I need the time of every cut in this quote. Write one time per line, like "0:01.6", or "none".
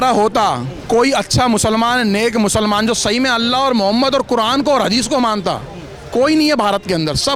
none